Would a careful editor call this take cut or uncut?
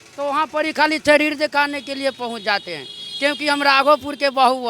uncut